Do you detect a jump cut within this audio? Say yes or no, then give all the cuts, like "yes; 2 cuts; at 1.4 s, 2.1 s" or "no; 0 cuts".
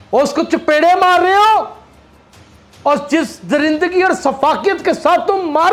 no; 0 cuts